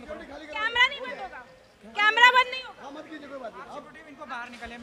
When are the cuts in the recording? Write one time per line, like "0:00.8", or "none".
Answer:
none